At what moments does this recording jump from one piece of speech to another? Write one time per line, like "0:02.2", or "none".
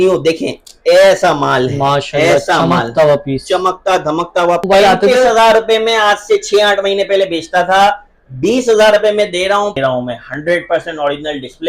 0:04.6
0:09.8